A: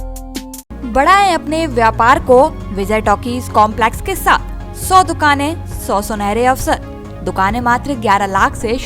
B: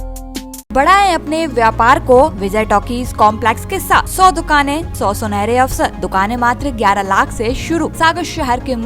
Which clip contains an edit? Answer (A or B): B